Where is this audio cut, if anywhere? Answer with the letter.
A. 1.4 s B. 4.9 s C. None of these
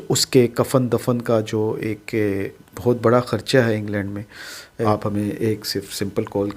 B